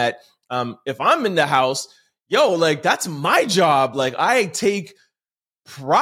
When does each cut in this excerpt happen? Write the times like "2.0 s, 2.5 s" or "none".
none